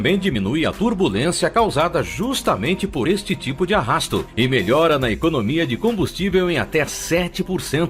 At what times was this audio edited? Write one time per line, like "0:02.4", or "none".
0:04.0